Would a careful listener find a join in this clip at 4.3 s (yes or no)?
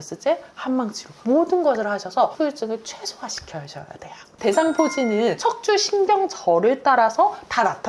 no